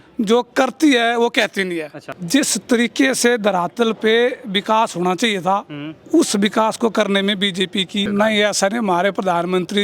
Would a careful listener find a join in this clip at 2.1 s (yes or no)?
yes